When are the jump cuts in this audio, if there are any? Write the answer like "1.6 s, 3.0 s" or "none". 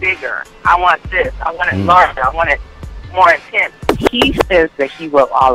3.8 s